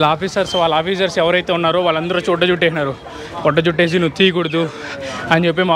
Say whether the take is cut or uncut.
uncut